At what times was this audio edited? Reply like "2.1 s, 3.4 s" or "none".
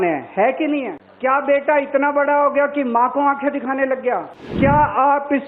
1.0 s, 4.4 s